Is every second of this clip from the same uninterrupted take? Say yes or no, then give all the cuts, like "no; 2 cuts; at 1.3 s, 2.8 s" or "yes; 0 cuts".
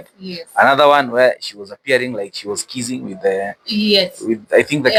yes; 0 cuts